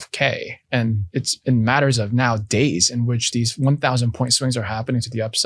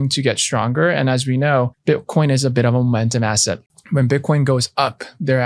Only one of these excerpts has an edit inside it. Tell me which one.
second; 2 cuts; at 1.7 s, 3.7 s

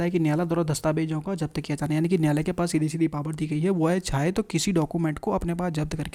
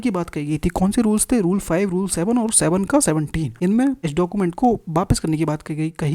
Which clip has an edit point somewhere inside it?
second; 2 cuts; at 3.5 s, 4.0 s

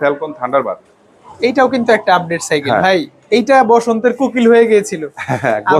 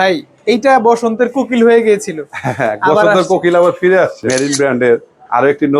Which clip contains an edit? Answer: second; 1 cut; at 4.2 s

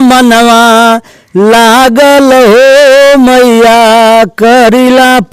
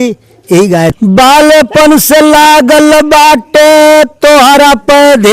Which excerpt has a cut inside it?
second; 1 cut; at 0.9 s

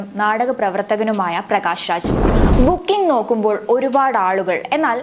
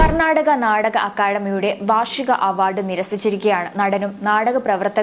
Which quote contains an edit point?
first; 1 cut; at 2.1 s

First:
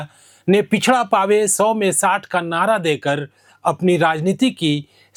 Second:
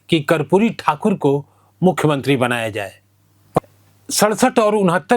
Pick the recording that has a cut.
second; 1 cut; at 3.6 s

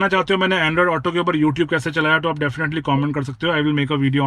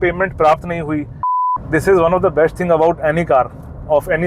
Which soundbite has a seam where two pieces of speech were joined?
second; 1 cut; at 1.4 s

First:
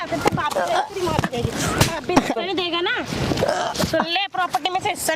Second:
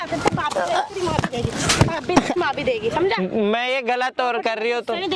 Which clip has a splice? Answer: first; 1 cut; at 2.3 s

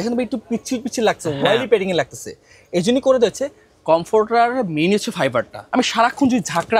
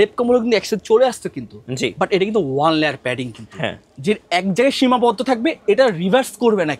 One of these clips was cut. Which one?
first; 1 cut; at 5.6 s

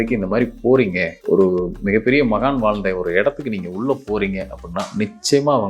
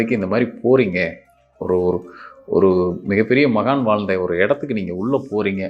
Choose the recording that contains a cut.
first; 1 cut; at 1.1 s

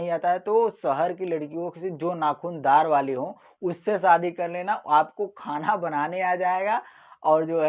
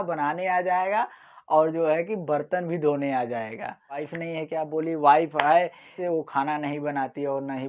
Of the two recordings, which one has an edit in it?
second; 2 cuts; at 4.1 s, 6.0 s

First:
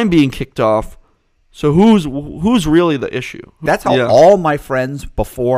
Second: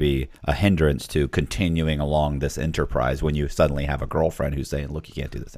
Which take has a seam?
first; 1 cut; at 3.5 s

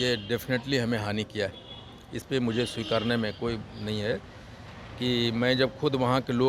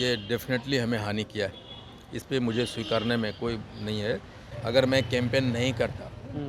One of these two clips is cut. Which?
second; 1 cut; at 4.5 s

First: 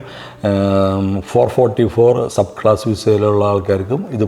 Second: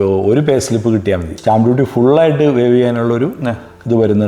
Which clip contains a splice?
second; 1 cut; at 1.3 s

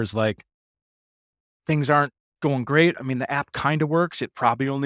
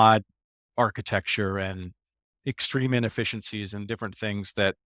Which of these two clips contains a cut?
first; 1 cut; at 3.0 s

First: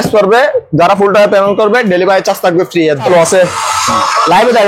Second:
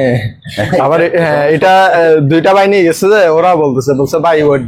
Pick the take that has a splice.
first; 1 cut; at 3.1 s

